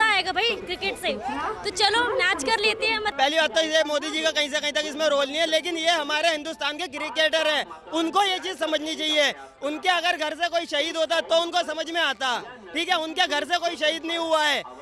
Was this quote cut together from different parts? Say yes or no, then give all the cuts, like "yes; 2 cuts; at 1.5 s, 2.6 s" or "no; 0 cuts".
yes; 1 cut; at 3.1 s